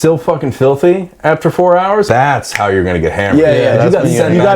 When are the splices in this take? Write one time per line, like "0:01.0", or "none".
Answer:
0:02.1